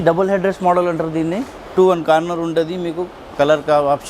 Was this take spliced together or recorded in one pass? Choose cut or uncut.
cut